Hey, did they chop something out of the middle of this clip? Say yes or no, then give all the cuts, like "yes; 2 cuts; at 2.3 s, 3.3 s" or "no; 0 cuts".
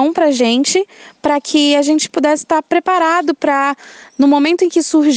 yes; 1 cut; at 2.1 s